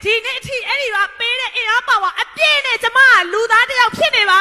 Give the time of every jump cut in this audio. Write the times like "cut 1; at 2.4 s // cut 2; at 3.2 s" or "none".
none